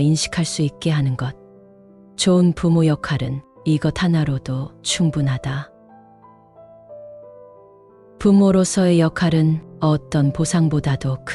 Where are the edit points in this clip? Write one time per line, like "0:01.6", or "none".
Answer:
0:05.7
0:08.2